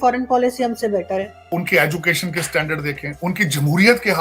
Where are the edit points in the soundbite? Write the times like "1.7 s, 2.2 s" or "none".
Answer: 1.4 s